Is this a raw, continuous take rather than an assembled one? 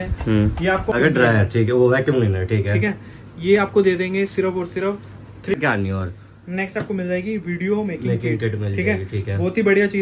no; 2 cuts; at 0.9 s, 5.6 s

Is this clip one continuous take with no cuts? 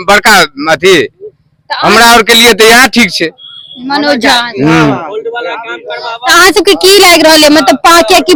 yes; 0 cuts

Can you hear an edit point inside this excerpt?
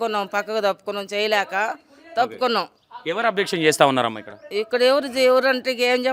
no; 0 cuts

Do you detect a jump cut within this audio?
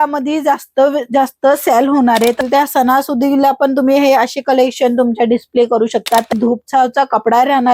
yes; 2 cuts; at 2.4 s, 6.3 s

